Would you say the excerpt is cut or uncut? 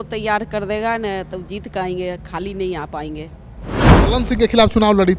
cut